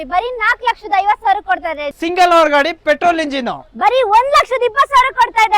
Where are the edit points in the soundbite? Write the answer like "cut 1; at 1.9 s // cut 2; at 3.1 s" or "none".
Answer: cut 1; at 1.9 s